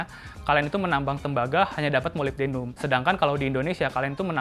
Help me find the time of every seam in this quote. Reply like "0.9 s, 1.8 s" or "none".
2.7 s